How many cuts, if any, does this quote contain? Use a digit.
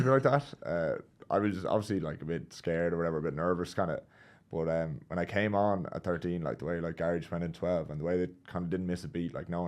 0